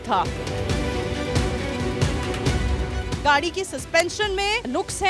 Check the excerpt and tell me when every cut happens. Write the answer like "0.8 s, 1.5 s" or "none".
3.1 s